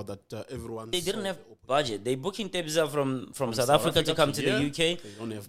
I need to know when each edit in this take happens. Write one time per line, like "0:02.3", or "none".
0:00.9